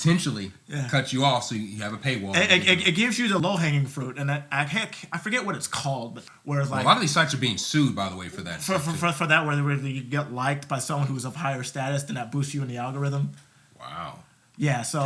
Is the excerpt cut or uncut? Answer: cut